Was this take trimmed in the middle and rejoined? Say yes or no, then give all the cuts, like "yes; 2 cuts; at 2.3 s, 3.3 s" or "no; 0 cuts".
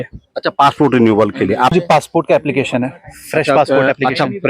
yes; 1 cut; at 1.7 s